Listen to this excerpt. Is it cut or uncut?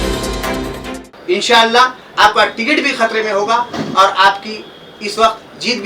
cut